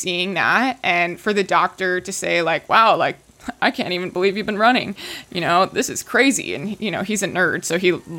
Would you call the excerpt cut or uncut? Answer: uncut